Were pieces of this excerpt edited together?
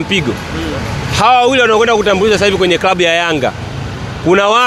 no; 0 cuts

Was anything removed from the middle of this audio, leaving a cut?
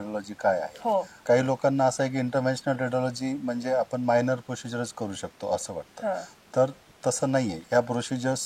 yes; 2 cuts; at 1.2 s, 7.6 s

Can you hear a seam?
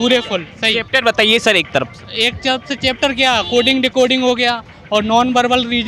no; 0 cuts

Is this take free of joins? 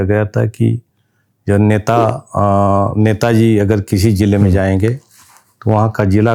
yes; 0 cuts

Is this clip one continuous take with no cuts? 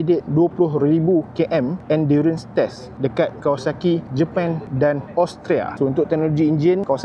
yes; 0 cuts

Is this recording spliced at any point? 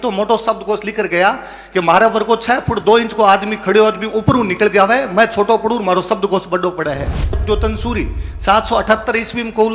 yes; 1 cut; at 7.4 s

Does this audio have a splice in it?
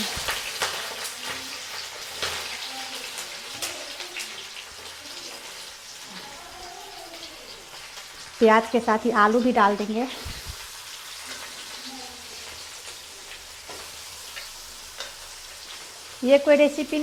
no; 0 cuts

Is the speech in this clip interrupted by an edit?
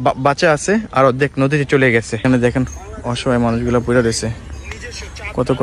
yes; 1 cut; at 2.2 s

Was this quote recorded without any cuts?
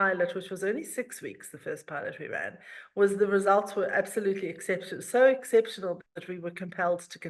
no; 1 cut; at 6.1 s

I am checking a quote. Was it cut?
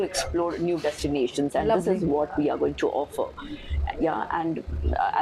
no; 0 cuts

